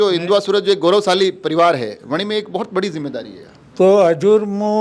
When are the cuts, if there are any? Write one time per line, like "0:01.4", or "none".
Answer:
none